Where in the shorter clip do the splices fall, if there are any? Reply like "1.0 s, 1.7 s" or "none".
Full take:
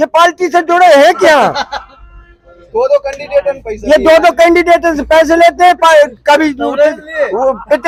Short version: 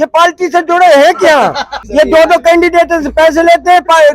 1.8 s